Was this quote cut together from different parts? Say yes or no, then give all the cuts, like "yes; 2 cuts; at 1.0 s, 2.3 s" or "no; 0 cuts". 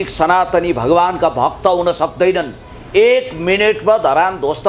no; 0 cuts